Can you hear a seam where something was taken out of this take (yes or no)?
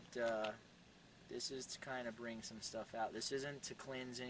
no